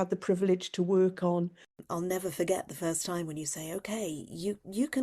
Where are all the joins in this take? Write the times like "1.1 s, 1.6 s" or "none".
1.8 s